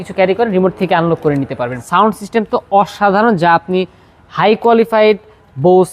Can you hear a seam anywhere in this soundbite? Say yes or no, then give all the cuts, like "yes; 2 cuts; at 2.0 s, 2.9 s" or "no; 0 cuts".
yes; 1 cut; at 1.8 s